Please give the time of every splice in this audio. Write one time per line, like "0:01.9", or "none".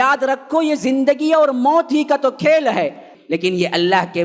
0:03.1